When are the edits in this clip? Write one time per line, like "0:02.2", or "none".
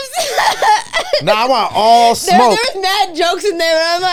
none

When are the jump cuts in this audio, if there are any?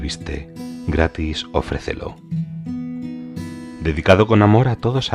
none

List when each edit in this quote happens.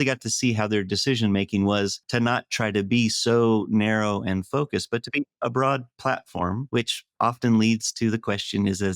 0:02.0
0:06.6

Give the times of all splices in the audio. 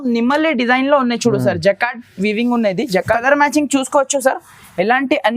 0:03.2

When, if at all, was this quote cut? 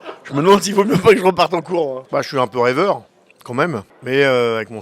0:02.0
0:03.9

